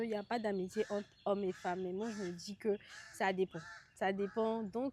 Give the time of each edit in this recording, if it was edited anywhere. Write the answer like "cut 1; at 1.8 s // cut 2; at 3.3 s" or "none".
none